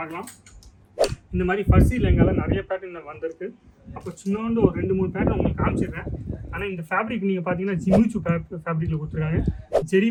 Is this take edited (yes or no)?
no